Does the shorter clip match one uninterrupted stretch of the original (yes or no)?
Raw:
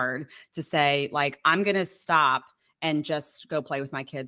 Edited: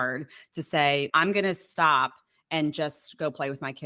no